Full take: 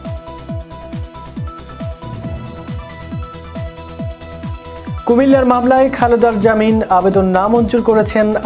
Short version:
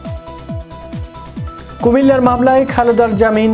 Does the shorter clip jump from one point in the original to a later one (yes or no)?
yes